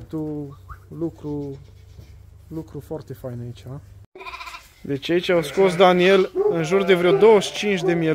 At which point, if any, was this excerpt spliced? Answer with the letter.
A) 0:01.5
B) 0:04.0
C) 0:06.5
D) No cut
B